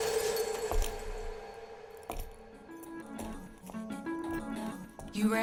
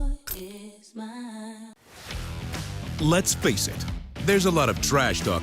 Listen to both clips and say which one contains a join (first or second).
second